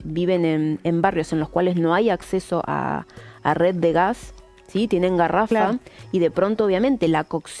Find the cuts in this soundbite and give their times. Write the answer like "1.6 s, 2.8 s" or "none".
none